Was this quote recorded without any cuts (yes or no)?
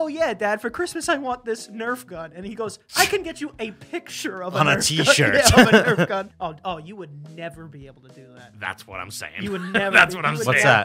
no